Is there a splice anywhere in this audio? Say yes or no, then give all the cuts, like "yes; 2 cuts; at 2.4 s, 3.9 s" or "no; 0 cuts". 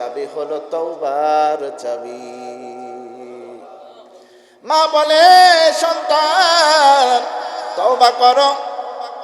no; 0 cuts